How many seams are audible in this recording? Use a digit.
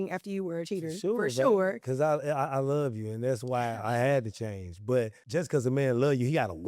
1